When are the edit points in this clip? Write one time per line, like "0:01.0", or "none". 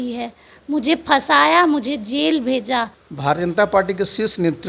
0:03.0